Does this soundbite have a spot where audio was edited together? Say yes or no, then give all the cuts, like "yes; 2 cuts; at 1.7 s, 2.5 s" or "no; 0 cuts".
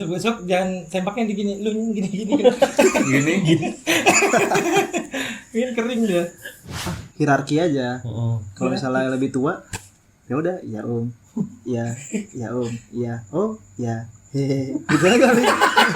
yes; 1 cut; at 7.0 s